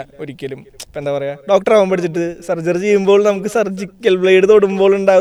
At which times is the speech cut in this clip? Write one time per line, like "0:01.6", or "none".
none